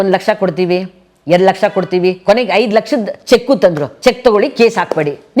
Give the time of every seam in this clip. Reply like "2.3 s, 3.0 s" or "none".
3.9 s